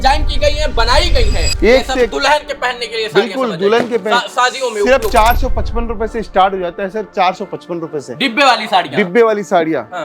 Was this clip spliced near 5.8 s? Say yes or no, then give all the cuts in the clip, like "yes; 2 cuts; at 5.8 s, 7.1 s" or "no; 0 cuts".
no; 1 cut; at 1.4 s